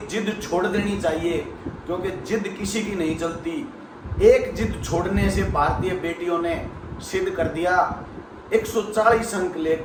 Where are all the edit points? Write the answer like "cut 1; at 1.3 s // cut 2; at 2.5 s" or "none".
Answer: none